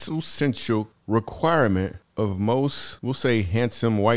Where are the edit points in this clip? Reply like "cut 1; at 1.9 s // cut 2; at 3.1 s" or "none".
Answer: cut 1; at 0.9 s // cut 2; at 2.0 s // cut 3; at 2.9 s